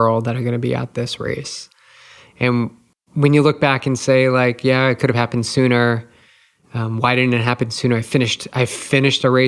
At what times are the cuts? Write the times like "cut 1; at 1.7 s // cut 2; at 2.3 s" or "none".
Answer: cut 1; at 2.9 s